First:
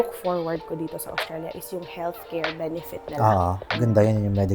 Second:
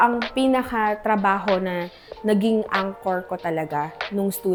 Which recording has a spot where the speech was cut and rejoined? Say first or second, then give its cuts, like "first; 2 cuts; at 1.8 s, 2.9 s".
first; 1 cut; at 3.6 s